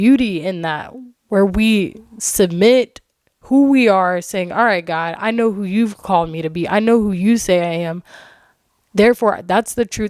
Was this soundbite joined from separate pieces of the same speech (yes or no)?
no